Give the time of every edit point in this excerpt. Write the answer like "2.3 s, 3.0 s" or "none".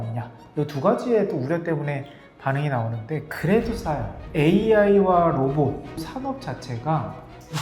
4.2 s